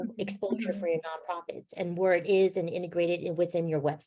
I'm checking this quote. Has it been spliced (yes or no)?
no